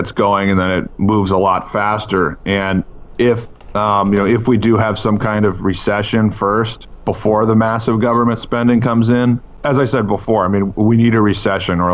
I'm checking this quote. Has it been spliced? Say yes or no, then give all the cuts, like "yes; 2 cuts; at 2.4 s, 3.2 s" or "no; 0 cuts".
yes; 3 cuts; at 3.6 s, 6.8 s, 9.6 s